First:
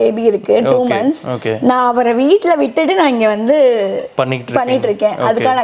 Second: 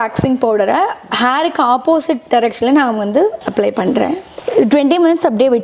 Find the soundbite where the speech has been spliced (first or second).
second